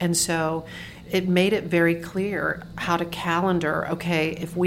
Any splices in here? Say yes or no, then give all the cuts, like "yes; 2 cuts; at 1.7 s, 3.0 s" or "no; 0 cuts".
yes; 1 cut; at 0.9 s